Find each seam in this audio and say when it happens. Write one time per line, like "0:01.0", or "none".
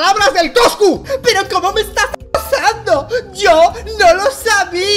0:01.0